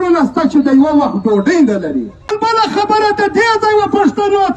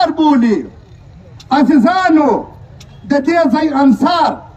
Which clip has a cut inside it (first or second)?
first